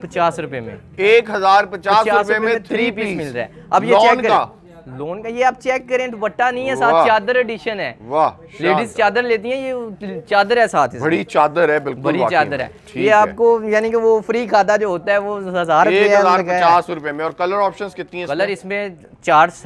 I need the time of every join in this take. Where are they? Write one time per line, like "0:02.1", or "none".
none